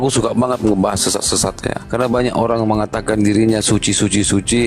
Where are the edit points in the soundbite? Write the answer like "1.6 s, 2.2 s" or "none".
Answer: 1.8 s